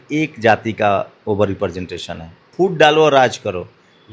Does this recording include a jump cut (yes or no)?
yes